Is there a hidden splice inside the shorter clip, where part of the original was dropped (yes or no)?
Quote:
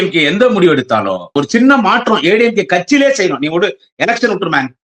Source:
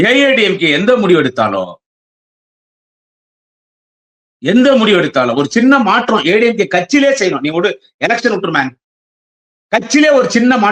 yes